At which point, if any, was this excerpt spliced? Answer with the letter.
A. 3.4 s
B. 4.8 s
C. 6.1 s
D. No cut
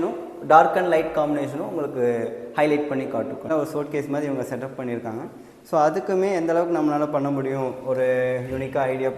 A